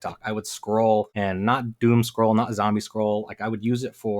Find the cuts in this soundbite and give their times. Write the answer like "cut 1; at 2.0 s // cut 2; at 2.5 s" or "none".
cut 1; at 1.1 s